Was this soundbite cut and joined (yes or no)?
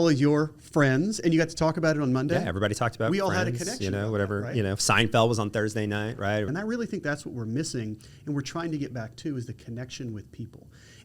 yes